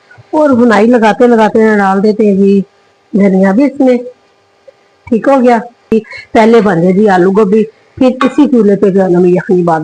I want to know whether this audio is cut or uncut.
cut